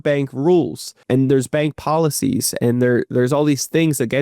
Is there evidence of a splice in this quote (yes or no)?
yes